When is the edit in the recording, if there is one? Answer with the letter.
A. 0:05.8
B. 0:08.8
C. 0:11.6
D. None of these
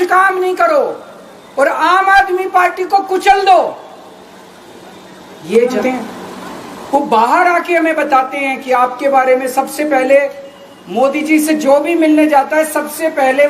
A